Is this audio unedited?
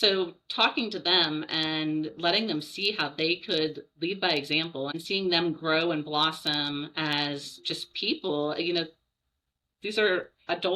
no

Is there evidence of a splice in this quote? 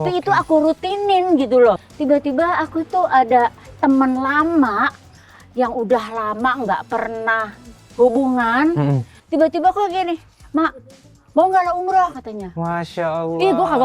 yes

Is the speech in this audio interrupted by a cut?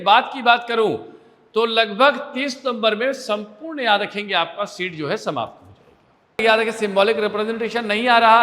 yes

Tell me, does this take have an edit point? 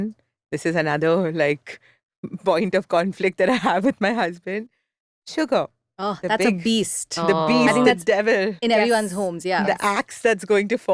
no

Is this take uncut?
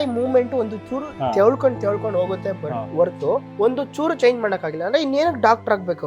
no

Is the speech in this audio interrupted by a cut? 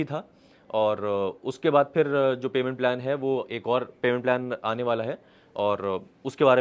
no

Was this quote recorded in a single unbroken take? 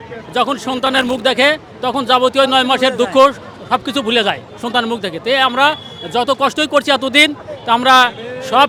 yes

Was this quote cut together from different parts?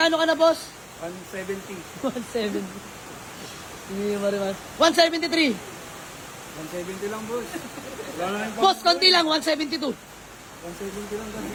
no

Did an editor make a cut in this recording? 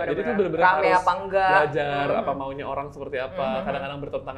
no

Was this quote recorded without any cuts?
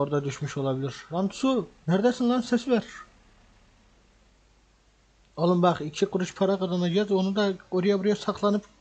no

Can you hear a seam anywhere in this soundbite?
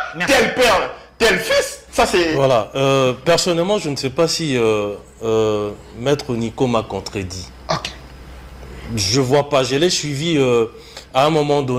no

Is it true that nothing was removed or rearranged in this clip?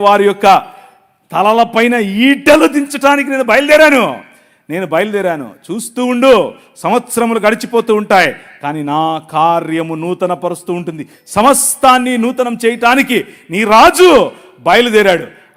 yes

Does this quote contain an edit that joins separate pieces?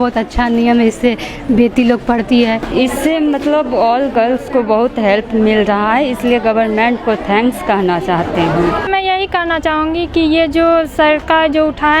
yes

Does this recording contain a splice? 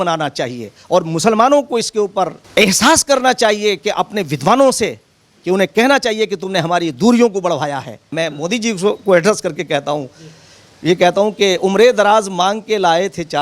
yes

